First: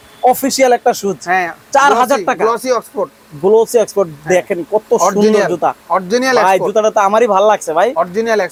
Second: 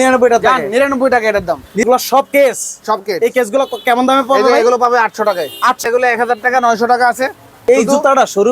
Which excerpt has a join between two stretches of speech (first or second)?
second